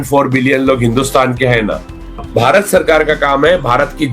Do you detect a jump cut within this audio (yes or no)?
yes